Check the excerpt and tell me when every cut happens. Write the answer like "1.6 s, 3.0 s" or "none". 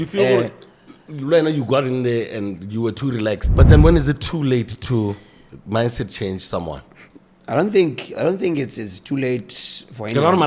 3.5 s